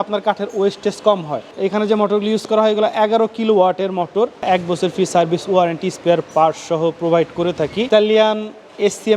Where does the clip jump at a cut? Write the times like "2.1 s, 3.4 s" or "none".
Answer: 1.5 s, 4.4 s, 7.9 s